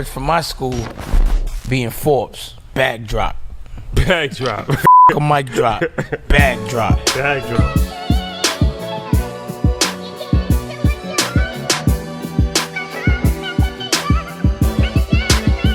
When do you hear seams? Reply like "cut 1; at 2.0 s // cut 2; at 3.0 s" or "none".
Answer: none